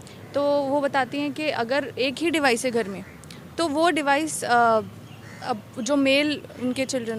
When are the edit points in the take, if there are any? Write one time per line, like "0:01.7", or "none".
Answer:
none